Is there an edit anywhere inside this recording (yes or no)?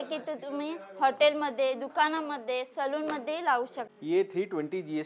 yes